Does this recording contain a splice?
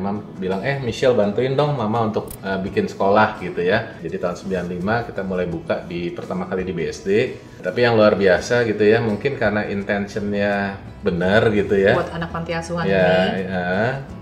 yes; 2 cuts; at 4.0 s, 7.5 s

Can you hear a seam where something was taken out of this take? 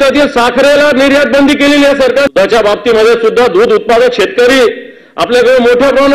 yes; 1 cut; at 2.3 s

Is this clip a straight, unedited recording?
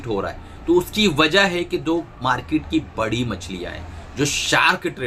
yes; 0 cuts

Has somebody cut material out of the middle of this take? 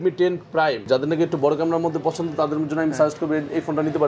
no; 0 cuts

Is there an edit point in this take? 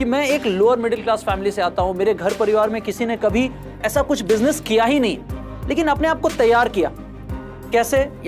no; 0 cuts

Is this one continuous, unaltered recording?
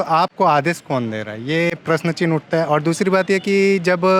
yes; 0 cuts

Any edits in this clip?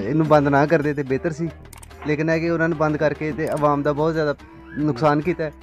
no; 0 cuts

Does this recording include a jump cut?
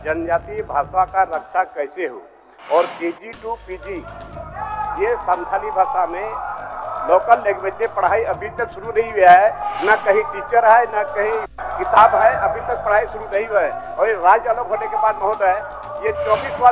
no; 0 cuts

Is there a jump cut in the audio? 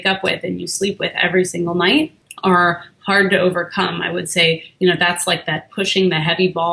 yes; 1 cut; at 2.2 s

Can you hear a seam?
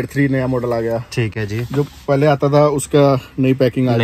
no; 0 cuts

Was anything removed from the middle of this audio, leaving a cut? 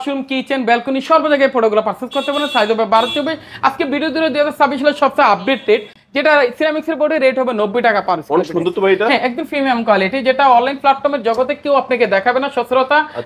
no; 0 cuts

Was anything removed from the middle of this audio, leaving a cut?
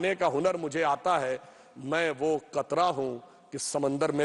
no; 0 cuts

